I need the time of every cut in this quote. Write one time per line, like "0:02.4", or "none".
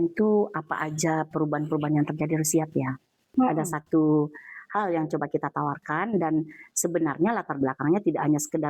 0:03.3